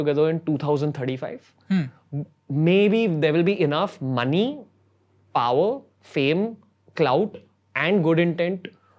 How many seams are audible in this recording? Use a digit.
0